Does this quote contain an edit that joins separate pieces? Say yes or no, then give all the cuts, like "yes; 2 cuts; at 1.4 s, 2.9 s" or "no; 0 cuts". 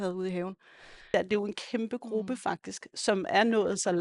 yes; 1 cut; at 1.1 s